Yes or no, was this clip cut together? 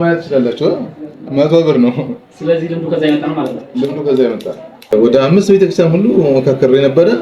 yes